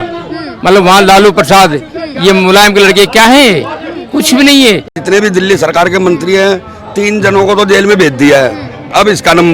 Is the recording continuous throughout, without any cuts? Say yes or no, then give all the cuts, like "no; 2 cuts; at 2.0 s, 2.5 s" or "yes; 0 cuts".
no; 1 cut; at 5.0 s